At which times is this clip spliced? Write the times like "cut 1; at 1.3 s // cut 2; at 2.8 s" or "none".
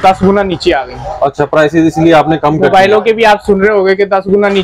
none